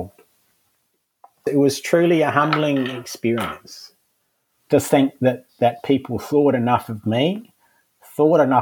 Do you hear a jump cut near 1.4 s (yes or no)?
yes